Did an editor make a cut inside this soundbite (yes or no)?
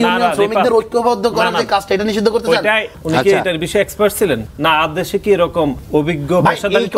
yes